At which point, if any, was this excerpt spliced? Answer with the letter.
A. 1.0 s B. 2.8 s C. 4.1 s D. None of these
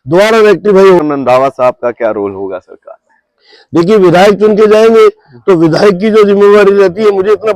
A